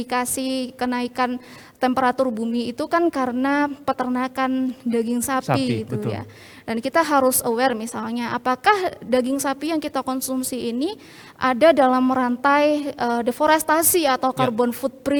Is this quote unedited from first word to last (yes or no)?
yes